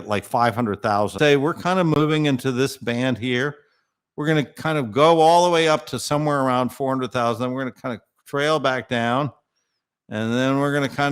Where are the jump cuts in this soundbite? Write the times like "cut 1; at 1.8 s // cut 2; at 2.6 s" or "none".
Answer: cut 1; at 1.1 s